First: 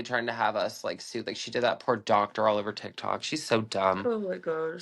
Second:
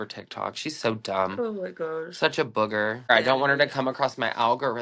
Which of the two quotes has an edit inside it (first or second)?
second